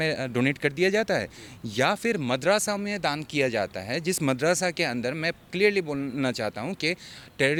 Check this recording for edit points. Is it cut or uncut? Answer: uncut